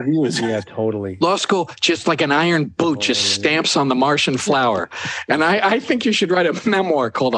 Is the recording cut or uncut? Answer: uncut